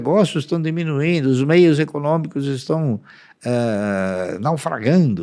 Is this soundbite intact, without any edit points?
yes; 0 cuts

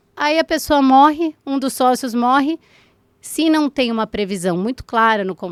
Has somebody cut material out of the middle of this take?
no; 0 cuts

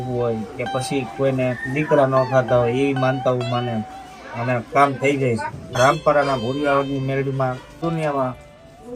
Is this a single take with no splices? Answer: no; 2 cuts; at 5.8 s, 7.8 s

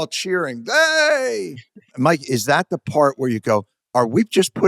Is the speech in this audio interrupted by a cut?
yes; 2 cuts; at 1.8 s, 3.8 s

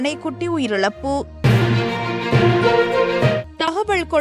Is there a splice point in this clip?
no; 0 cuts

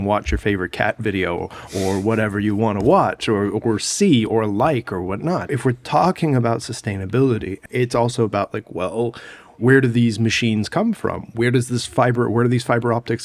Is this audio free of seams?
no; 2 cuts; at 5.6 s, 7.6 s

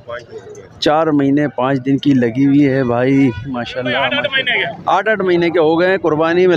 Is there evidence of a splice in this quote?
yes; 1 cut; at 4.1 s

